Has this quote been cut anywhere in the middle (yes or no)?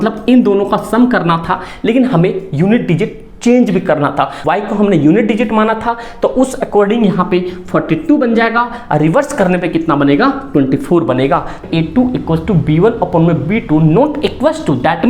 yes